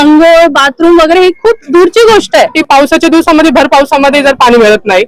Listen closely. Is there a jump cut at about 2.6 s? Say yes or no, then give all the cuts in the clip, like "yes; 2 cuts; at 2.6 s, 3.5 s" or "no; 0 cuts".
yes; 1 cut; at 2.6 s